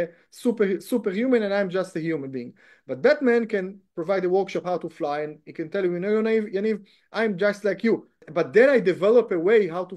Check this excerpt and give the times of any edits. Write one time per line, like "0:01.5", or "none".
0:08.2